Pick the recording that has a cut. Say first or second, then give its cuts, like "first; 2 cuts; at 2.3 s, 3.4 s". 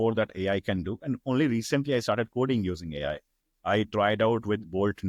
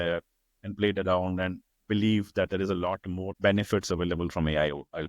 second; 1 cut; at 3.4 s